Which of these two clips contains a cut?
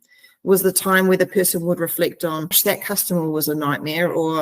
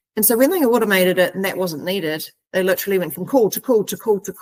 first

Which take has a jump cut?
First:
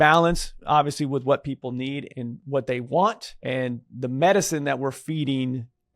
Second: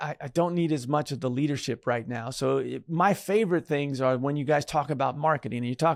first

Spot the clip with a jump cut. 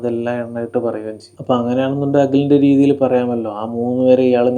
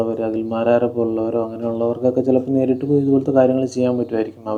first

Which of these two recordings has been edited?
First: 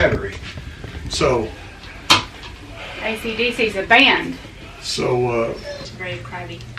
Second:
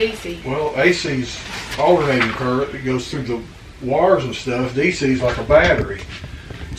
first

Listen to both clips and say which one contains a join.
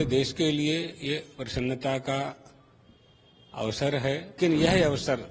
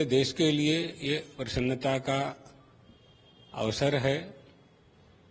first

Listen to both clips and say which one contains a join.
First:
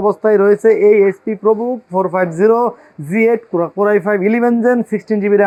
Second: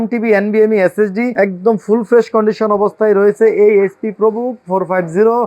second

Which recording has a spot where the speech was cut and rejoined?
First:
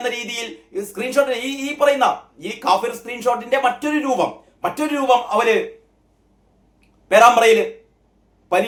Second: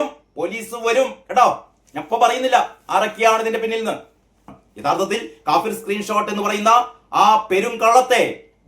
second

